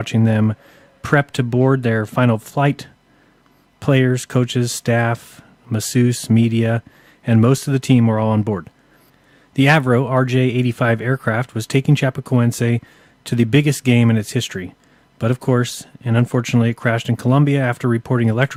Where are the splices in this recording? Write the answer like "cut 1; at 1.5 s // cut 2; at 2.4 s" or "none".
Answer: none